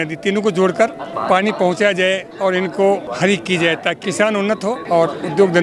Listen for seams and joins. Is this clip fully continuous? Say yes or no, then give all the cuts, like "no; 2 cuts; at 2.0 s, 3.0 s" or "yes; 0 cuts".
no; 3 cuts; at 1.1 s, 3.1 s, 4.5 s